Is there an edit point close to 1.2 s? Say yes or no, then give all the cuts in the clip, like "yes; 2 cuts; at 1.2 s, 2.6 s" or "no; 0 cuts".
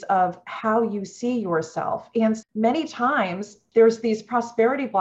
no; 2 cuts; at 2.4 s, 3.6 s